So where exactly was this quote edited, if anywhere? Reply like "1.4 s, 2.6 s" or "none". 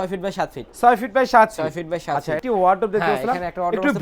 2.4 s